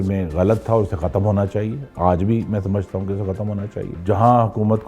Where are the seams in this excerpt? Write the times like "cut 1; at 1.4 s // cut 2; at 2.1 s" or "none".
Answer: cut 1; at 4.0 s